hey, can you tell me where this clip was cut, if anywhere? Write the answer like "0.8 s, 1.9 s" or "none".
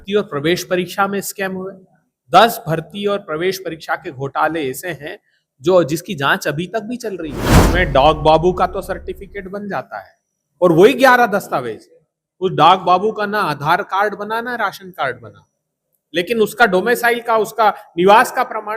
7.6 s

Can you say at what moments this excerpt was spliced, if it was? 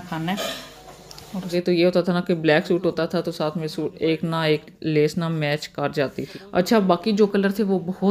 1.5 s, 6.3 s

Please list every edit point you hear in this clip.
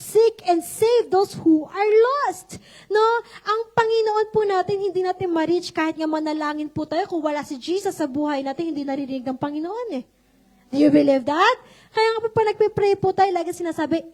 none

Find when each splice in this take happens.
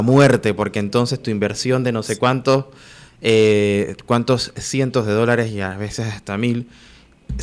none

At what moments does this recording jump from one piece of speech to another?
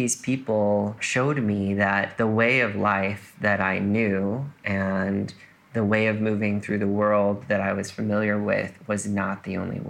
1.0 s, 2.1 s

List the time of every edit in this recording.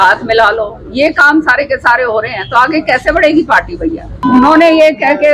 4.2 s

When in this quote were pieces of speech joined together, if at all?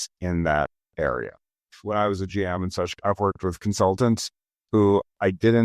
1.7 s, 3.6 s

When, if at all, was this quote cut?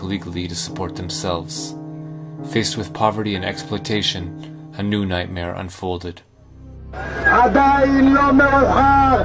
2.9 s

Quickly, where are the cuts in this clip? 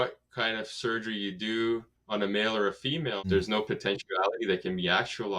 1.9 s, 3.3 s

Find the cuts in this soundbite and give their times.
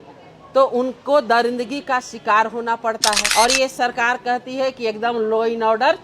3.2 s

